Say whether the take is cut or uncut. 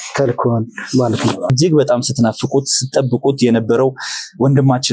cut